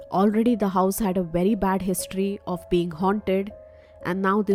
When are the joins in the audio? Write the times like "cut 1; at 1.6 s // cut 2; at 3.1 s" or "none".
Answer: none